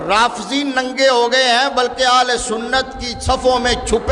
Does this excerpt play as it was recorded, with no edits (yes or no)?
yes